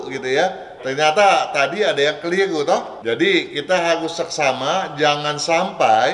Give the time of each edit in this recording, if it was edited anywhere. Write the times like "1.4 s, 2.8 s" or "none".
2.9 s